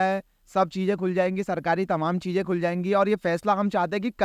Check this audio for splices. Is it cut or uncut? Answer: uncut